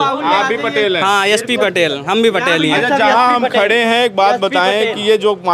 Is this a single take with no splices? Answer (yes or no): yes